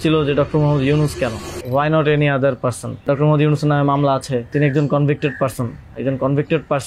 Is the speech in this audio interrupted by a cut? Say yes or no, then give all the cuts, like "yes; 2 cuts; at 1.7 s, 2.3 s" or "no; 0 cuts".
yes; 3 cuts; at 1.5 s, 3.0 s, 4.5 s